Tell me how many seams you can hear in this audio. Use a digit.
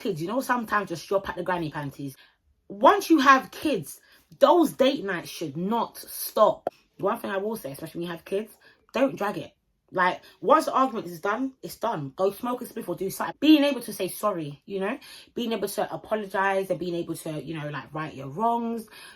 3